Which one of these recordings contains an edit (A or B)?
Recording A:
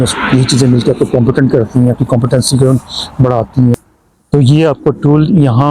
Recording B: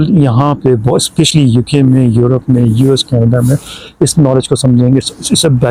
A